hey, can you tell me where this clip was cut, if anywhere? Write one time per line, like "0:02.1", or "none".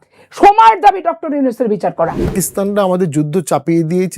0:02.3